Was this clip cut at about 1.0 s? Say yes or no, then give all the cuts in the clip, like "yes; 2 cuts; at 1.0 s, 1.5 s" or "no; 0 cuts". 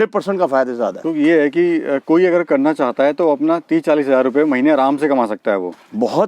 yes; 1 cut; at 1.0 s